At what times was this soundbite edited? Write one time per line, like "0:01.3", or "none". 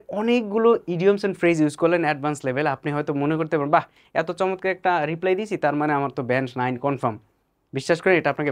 none

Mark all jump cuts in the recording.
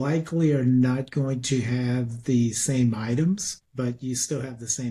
0:03.6

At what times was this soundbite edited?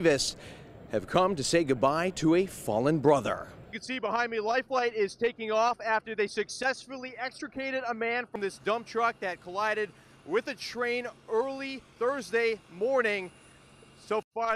0:03.8

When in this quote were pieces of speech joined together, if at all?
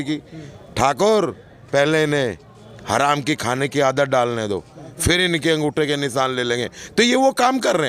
none

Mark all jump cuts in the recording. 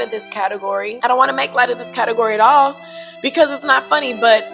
0:00.9

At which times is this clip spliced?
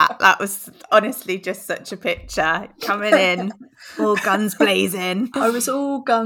0:05.3

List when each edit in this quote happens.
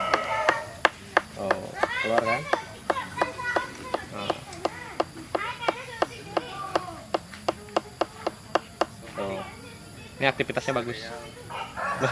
none

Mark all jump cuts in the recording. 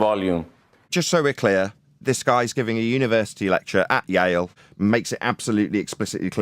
0:00.9
0:04.6

